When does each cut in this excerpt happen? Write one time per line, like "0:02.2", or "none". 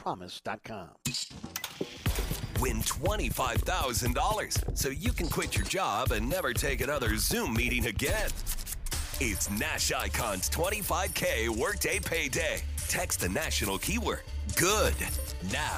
0:00.9